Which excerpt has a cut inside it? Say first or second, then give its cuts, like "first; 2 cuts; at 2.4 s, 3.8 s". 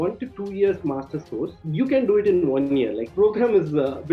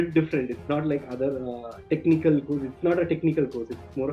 first; 2 cuts; at 1.5 s, 3.1 s